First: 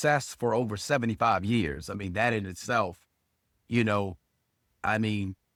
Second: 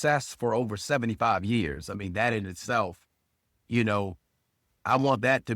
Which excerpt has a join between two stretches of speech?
second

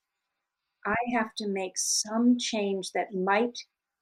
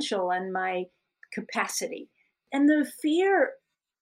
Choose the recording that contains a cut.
second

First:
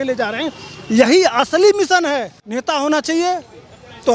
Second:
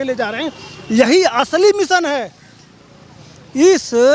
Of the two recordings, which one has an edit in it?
first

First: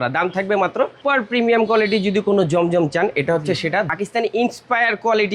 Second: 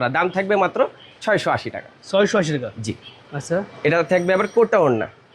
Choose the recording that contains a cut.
first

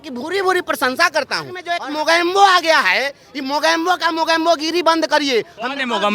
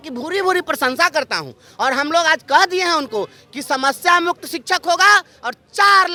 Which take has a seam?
first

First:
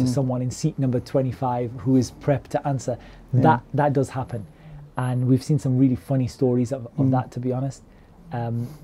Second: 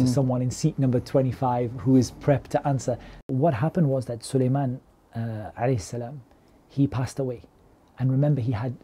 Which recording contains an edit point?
second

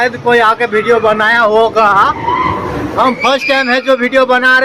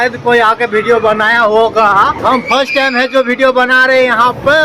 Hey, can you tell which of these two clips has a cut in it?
second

